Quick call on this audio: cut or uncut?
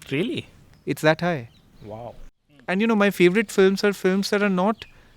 cut